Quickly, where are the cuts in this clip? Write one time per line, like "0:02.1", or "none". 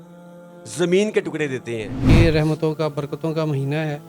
0:02.0